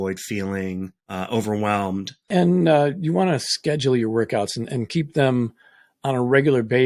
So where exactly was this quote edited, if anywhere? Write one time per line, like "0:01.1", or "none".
0:01.0
0:02.1